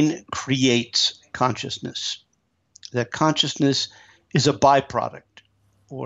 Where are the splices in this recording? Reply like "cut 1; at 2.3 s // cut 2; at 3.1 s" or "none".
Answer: none